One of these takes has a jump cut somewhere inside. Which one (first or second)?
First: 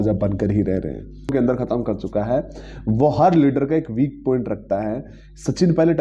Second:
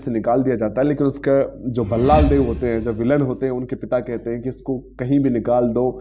first